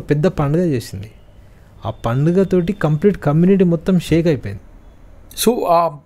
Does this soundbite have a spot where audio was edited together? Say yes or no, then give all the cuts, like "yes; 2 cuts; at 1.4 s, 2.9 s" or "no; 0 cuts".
no; 0 cuts